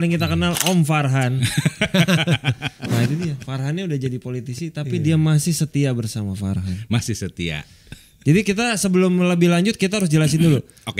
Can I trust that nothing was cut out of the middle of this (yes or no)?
yes